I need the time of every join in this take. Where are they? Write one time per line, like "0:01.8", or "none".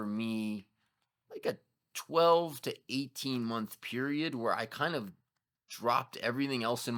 none